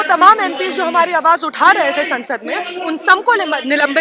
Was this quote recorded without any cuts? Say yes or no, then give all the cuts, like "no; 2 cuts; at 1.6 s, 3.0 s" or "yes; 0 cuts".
yes; 0 cuts